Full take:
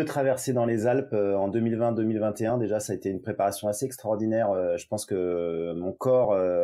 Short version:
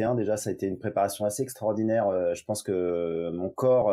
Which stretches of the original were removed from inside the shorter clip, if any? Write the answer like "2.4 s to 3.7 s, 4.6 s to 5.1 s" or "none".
none

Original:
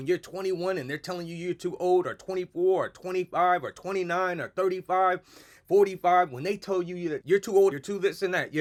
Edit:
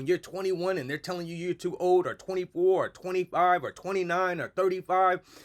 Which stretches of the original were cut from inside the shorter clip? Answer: none

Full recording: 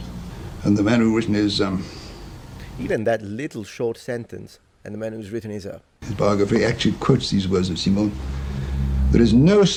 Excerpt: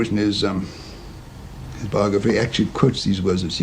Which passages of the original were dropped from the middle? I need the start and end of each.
2.7 s to 5.8 s

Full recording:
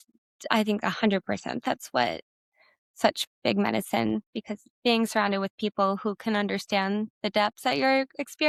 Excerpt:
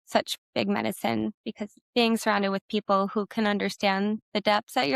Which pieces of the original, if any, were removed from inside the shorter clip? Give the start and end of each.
none

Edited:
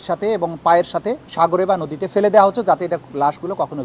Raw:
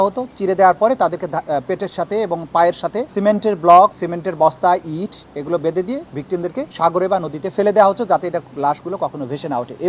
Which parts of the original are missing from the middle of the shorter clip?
3.1 s to 6.6 s

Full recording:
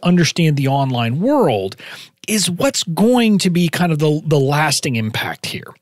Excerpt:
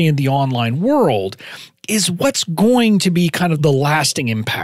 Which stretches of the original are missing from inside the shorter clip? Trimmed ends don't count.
4.0 s to 4.3 s

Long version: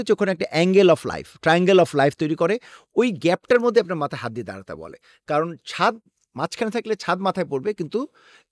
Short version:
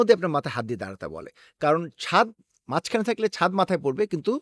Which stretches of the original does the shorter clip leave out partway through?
none

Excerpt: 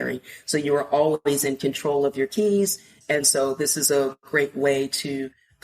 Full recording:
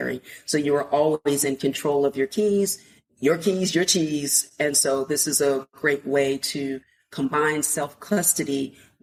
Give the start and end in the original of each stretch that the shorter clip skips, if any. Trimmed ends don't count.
2.9 s to 4.4 s

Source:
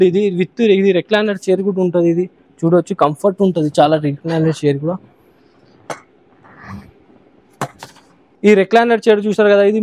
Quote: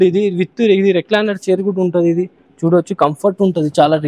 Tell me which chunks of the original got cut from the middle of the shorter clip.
none

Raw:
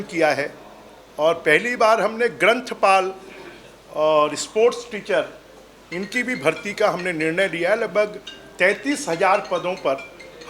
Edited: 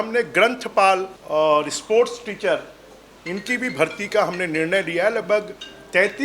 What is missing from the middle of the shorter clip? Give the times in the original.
3.2 s to 3.8 s

